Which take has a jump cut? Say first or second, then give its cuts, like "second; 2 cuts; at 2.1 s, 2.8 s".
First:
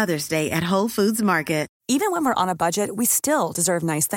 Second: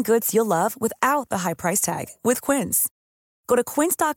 first; 1 cut; at 1.8 s